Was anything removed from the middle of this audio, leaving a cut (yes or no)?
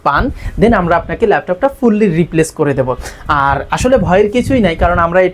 no